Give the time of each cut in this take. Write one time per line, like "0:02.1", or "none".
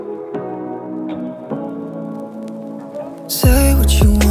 none